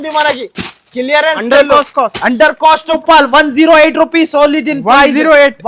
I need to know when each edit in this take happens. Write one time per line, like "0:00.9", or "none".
0:03.0